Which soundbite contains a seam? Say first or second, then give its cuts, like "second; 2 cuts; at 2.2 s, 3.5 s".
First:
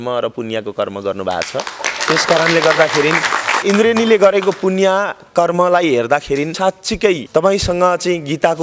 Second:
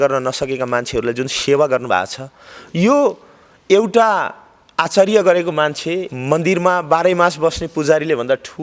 first; 2 cuts; at 3.6 s, 6.5 s